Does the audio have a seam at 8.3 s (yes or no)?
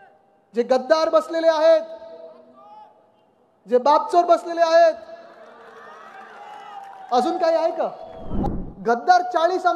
yes